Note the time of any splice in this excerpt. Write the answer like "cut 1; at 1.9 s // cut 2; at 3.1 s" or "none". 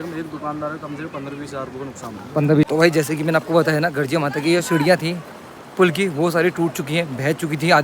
cut 1; at 2.6 s